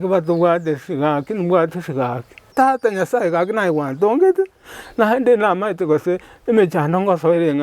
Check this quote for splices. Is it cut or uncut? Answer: cut